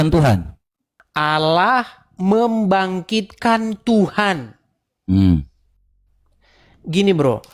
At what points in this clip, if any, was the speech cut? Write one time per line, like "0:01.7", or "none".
0:01.1